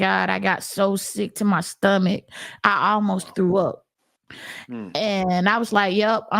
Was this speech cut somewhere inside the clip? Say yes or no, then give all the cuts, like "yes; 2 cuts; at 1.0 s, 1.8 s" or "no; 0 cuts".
no; 0 cuts